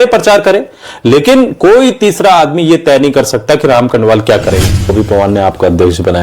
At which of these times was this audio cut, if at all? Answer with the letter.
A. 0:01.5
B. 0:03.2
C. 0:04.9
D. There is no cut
C